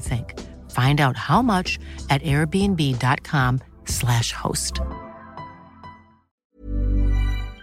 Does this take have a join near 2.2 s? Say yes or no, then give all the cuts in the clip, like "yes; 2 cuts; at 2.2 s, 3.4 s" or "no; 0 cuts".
no; 1 cut; at 6.5 s